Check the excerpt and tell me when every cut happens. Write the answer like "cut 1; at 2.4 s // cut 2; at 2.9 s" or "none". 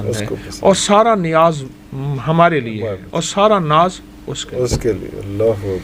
none